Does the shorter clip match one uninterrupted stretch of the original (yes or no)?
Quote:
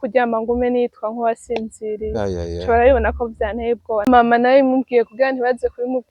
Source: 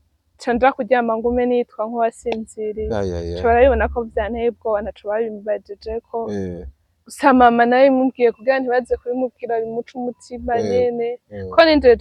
no